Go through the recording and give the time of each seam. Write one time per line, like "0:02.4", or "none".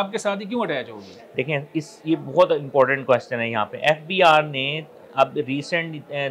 none